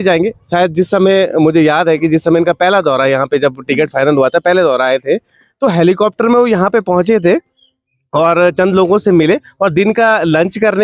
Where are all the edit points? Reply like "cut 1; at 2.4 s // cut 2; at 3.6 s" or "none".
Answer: none

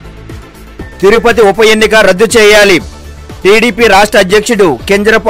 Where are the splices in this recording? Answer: cut 1; at 1.0 s

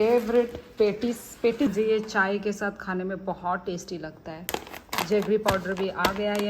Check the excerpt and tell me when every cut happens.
cut 1; at 1.7 s // cut 2; at 4.5 s

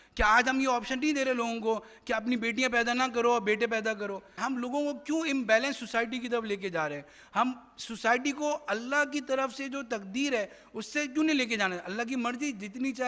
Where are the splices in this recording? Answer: cut 1; at 4.4 s

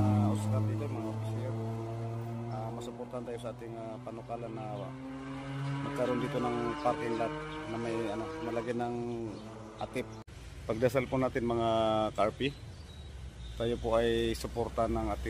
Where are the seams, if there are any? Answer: cut 1; at 10.2 s

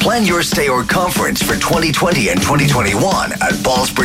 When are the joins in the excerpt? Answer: none

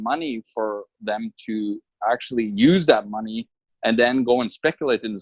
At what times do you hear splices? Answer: none

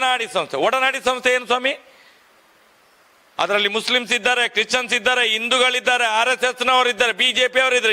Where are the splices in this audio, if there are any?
none

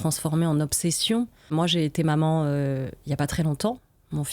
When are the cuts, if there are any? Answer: cut 1; at 1.5 s

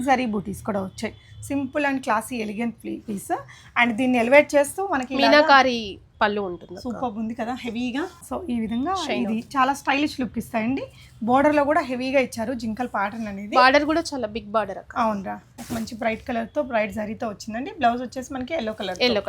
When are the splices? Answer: cut 1; at 8.2 s // cut 2; at 15.6 s

